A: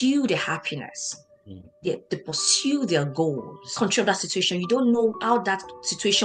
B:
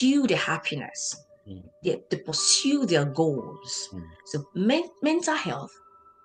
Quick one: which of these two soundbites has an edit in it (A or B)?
A